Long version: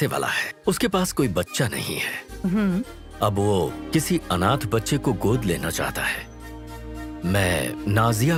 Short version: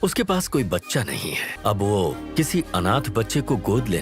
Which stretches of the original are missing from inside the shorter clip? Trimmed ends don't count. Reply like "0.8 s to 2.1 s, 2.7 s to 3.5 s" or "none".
2.1 s to 3.0 s